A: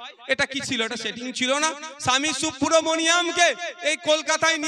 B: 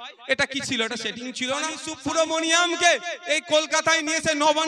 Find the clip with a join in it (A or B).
B